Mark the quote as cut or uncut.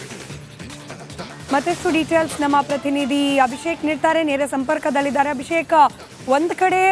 cut